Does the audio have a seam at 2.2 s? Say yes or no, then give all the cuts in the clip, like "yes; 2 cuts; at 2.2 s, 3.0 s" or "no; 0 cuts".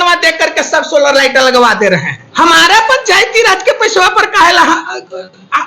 yes; 1 cut; at 2.2 s